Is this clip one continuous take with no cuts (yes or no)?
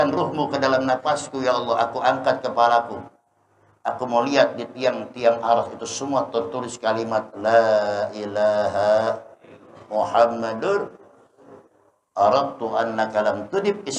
yes